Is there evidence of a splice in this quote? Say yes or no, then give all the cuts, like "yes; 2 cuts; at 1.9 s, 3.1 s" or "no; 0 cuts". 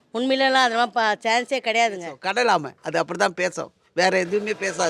yes; 1 cut; at 2.1 s